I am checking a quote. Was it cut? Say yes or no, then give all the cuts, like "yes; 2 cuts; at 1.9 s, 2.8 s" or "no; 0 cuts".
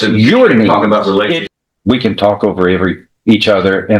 yes; 1 cut; at 1.5 s